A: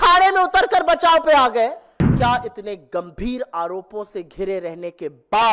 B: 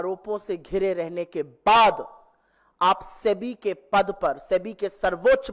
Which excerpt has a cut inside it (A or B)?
A